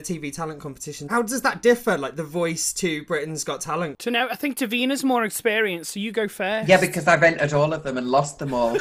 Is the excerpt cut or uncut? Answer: cut